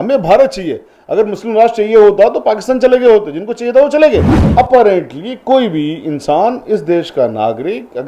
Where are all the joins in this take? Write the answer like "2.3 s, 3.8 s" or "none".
4.4 s